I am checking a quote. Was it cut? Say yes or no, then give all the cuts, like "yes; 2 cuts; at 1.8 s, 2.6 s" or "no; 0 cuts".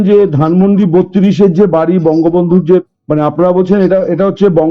yes; 1 cut; at 3.0 s